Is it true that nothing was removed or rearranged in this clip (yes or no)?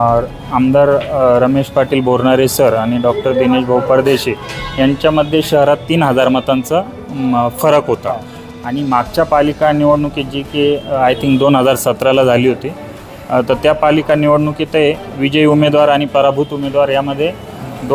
yes